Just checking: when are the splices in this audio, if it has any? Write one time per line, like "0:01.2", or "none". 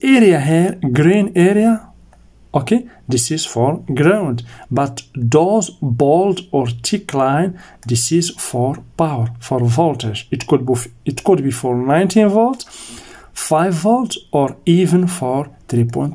none

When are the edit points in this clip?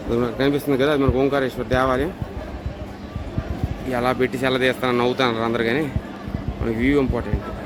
none

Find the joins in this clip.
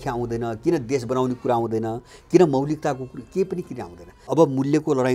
0:04.1

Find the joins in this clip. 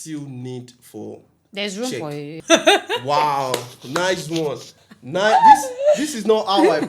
0:02.4

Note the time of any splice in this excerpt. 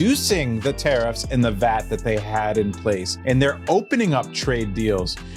0:03.1

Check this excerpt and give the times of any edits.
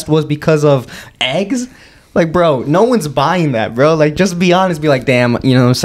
none

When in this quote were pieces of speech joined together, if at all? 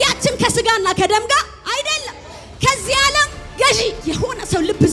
0:02.5
0:04.0

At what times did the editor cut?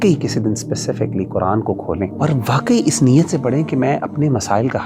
0:02.1

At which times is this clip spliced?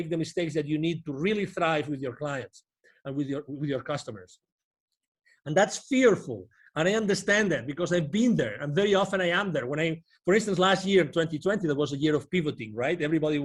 none

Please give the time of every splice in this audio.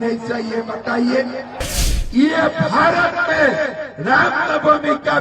0:01.7

